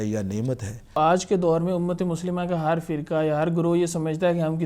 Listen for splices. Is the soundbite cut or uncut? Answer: cut